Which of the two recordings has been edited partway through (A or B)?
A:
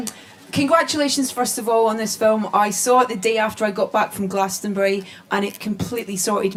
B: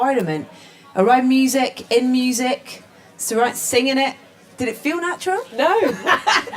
B